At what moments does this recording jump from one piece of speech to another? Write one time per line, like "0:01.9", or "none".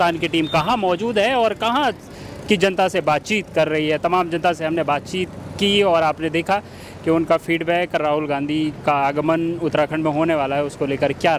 none